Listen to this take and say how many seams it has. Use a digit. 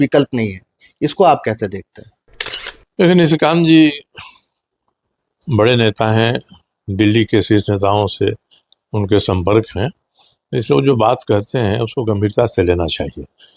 0